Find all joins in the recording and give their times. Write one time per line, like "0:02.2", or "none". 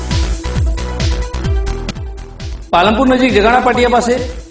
0:01.8